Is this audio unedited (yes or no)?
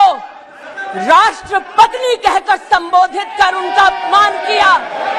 yes